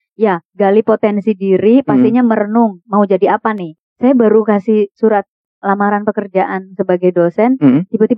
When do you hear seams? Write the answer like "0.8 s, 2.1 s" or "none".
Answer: 3.6 s